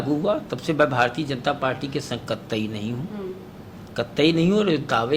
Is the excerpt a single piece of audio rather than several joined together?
yes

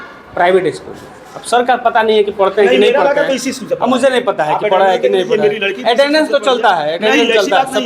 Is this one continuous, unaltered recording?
yes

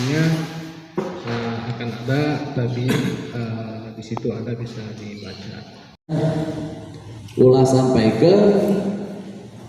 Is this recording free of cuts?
no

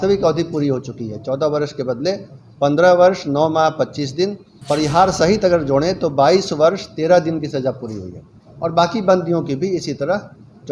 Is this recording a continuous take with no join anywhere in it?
no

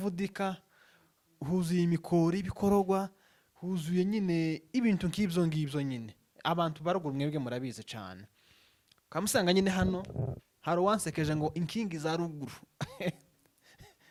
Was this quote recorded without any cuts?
yes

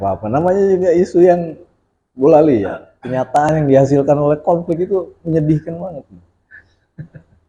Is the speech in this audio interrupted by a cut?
yes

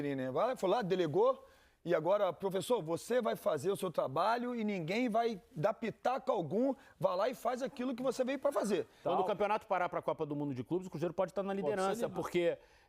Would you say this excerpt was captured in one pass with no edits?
no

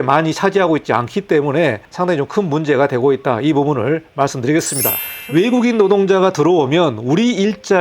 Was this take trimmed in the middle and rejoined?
yes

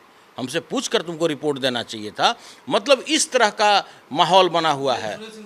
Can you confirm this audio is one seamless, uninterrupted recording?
yes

